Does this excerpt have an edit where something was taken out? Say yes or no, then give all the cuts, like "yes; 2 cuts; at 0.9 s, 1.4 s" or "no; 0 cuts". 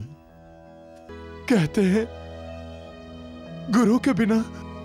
yes; 1 cut; at 1.1 s